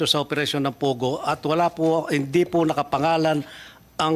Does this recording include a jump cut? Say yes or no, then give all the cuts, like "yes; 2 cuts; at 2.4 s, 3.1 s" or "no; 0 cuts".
yes; 1 cut; at 2.5 s